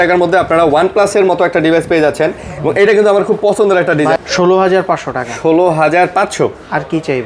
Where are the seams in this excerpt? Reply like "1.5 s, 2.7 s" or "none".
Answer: 4.2 s